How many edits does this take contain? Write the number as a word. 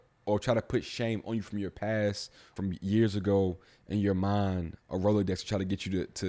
one